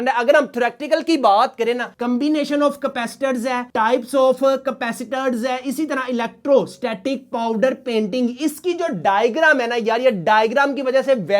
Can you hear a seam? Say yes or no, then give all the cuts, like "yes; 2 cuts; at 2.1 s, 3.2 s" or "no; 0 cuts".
yes; 1 cut; at 1.9 s